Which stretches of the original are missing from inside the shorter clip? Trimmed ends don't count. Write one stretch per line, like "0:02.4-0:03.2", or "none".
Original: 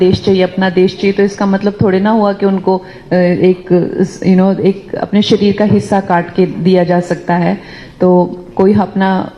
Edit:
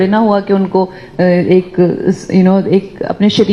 none